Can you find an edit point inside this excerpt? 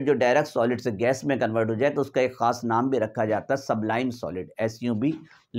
no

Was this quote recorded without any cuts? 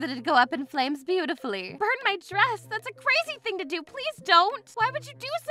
yes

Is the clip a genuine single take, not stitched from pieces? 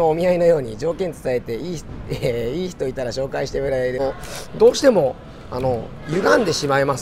no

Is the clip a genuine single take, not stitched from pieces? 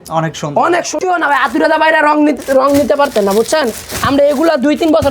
no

